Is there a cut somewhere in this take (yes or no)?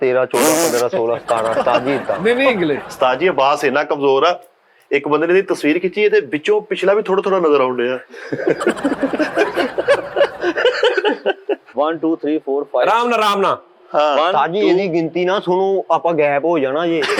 yes